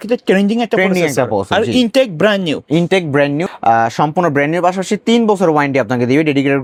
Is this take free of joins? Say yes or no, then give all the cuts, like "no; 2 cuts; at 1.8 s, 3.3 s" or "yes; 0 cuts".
yes; 0 cuts